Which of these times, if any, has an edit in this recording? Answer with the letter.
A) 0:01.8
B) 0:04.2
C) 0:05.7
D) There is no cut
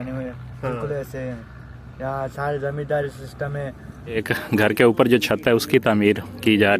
B